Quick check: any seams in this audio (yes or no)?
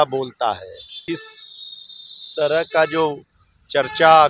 yes